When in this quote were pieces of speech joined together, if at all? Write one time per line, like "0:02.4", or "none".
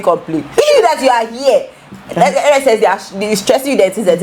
none